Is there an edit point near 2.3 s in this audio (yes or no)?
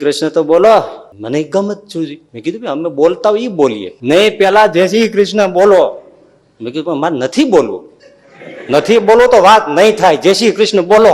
yes